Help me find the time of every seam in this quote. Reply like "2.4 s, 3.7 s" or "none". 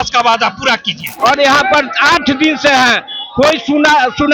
1.0 s